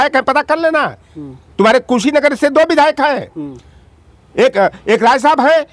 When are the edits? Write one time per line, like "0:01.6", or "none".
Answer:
none